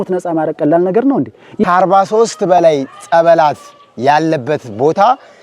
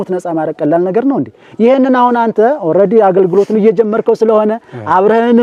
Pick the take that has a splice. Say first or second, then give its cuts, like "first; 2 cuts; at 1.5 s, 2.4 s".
first; 1 cut; at 1.4 s